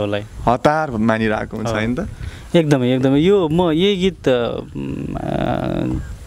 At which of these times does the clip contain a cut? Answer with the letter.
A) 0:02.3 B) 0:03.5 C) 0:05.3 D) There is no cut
D